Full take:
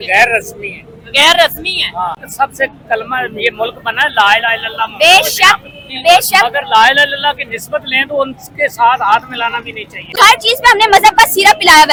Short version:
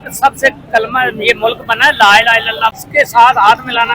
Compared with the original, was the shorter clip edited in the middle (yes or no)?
yes